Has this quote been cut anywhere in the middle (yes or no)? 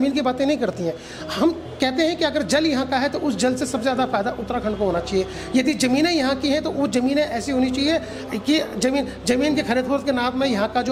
no